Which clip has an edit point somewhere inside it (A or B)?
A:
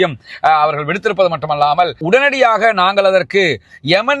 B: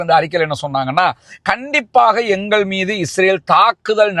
A